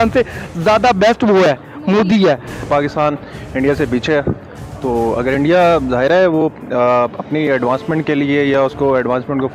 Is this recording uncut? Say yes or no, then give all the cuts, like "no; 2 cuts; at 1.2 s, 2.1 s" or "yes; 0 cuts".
yes; 0 cuts